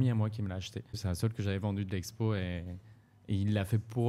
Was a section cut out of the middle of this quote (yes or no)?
yes